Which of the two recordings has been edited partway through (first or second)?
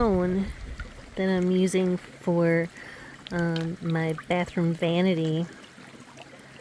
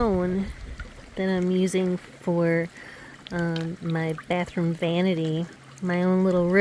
second